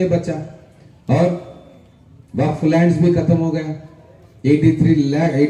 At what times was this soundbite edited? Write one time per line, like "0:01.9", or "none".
none